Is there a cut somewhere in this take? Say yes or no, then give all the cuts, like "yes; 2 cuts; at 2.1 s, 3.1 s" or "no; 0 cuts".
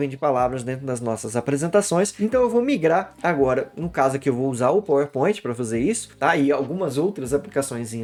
no; 0 cuts